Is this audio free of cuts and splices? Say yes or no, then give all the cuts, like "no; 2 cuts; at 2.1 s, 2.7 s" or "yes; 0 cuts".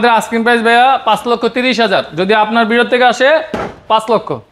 yes; 0 cuts